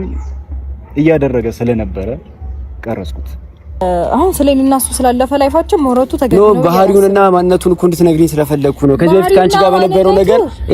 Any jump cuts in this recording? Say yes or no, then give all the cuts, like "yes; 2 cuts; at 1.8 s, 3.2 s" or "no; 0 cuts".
yes; 1 cut; at 3.8 s